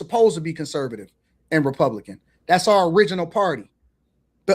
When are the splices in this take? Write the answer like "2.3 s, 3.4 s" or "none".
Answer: 1.7 s